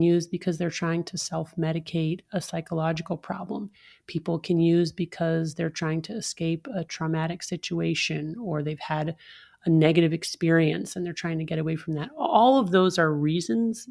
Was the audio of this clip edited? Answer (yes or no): no